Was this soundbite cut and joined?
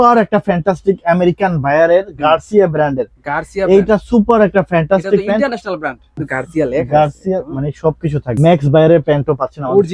no; 0 cuts

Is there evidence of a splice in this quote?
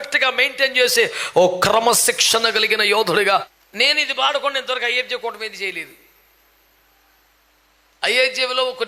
yes; 1 cut; at 3.6 s

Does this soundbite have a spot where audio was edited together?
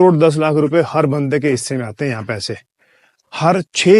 yes; 1 cut; at 2.8 s

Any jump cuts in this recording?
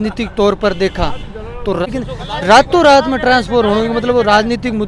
no; 0 cuts

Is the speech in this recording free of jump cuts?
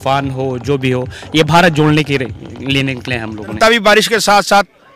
no; 1 cut; at 3.5 s

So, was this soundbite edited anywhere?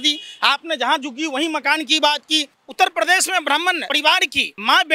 yes; 2 cuts; at 2.6 s, 4.0 s

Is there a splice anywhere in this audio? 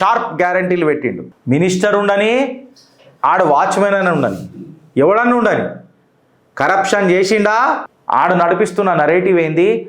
yes; 2 cuts; at 1.2 s, 7.9 s

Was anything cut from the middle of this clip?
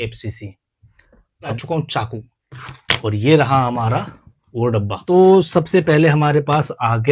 yes; 2 cuts; at 1.5 s, 5.0 s

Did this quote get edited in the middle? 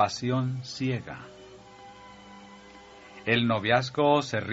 no; 0 cuts

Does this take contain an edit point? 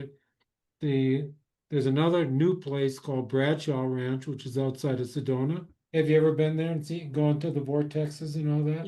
yes; 1 cut; at 5.7 s

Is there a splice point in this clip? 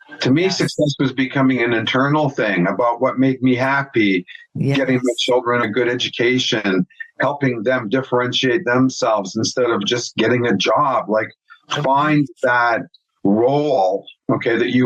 yes; 2 cuts; at 5.6 s, 9.8 s

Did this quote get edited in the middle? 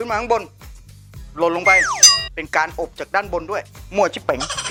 no; 0 cuts

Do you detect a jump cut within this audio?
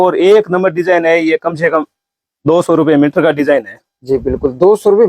no; 0 cuts

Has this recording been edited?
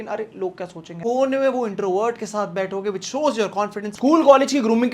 yes; 2 cuts; at 1.0 s, 3.9 s

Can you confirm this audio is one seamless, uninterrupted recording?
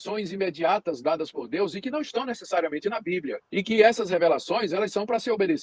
no; 1 cut; at 3.4 s

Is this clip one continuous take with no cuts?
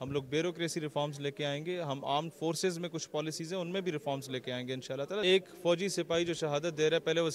no; 1 cut; at 5.2 s

